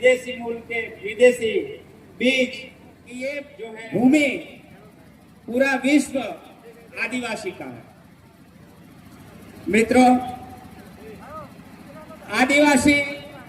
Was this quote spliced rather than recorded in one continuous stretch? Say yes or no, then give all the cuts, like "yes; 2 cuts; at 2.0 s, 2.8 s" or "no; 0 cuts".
yes; 1 cut; at 3.5 s